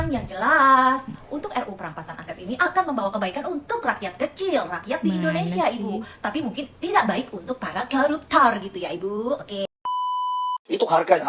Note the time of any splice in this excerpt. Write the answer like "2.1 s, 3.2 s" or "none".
10.0 s